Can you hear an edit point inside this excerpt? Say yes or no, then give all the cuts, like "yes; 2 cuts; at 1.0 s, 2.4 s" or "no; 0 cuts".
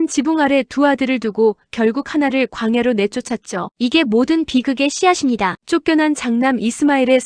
no; 0 cuts